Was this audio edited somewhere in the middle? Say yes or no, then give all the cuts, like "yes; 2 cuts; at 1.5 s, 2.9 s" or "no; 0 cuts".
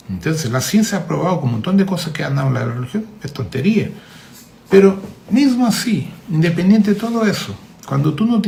no; 0 cuts